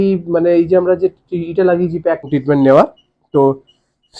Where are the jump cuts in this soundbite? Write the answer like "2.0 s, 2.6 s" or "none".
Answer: 2.3 s